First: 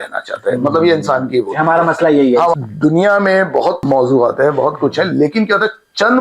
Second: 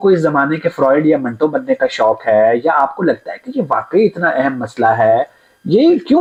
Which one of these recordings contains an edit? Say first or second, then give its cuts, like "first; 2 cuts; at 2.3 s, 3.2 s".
first; 2 cuts; at 2.5 s, 3.8 s